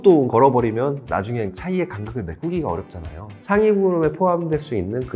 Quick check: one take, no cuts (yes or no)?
no